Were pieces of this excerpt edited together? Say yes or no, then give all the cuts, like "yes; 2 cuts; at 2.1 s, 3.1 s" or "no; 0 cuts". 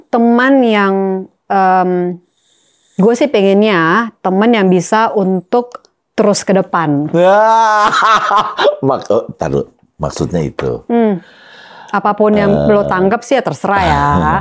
no; 0 cuts